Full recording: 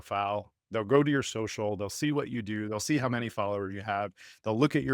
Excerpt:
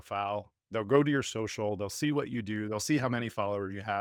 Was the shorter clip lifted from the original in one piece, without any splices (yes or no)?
yes